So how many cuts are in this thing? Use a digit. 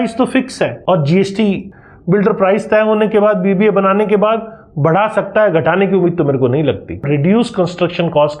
2